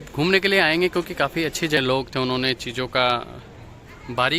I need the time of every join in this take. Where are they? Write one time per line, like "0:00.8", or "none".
0:01.8